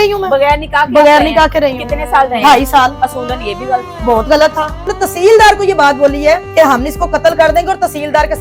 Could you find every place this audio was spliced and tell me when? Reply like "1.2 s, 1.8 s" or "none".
4.8 s, 6.5 s